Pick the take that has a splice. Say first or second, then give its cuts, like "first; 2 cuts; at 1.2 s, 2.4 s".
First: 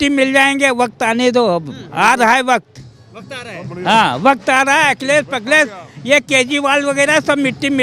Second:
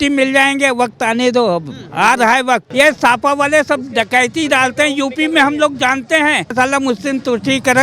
second; 2 cuts; at 2.7 s, 6.5 s